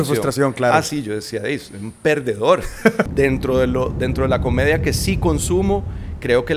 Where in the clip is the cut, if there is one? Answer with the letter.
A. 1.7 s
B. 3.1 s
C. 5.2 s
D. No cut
B